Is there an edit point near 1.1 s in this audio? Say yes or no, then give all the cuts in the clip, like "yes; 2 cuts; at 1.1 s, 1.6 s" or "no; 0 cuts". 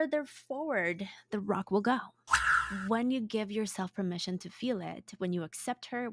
no; 1 cut; at 2.4 s